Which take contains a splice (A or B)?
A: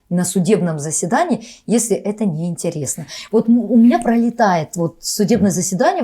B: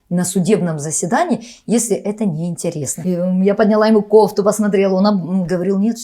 B